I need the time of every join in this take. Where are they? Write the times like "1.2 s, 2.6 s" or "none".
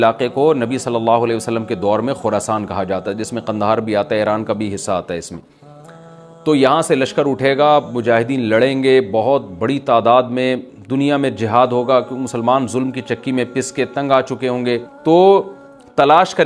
14.9 s